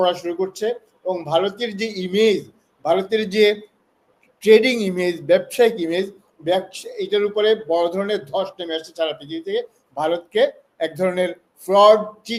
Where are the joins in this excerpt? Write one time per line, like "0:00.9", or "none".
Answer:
none